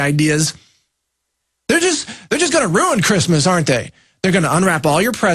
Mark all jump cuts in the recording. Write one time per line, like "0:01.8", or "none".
0:01.6